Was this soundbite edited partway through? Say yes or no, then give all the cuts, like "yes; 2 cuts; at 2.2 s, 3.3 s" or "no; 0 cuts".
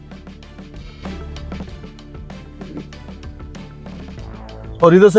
no; 0 cuts